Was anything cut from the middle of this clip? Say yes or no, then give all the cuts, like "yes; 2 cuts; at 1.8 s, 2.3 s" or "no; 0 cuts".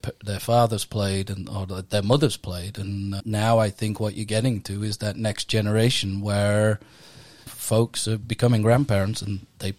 no; 0 cuts